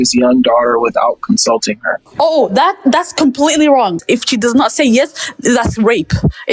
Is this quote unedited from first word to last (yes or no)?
no